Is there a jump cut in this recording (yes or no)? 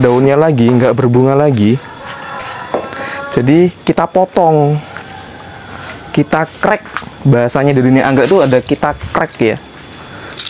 no